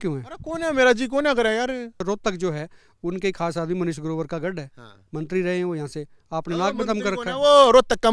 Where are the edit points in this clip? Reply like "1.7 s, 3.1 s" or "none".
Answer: 2.0 s